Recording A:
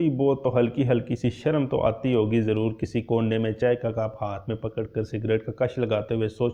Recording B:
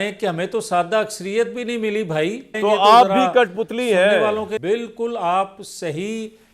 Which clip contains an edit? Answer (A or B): B